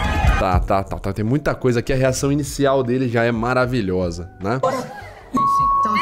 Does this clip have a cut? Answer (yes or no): no